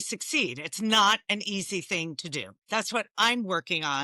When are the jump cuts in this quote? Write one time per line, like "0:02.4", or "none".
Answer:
0:02.5